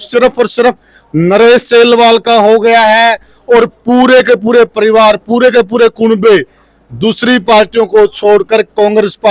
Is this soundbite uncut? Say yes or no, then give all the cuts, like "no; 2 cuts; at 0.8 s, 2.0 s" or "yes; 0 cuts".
yes; 0 cuts